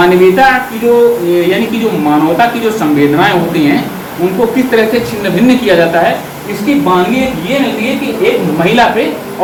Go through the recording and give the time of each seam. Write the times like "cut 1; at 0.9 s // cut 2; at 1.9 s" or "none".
none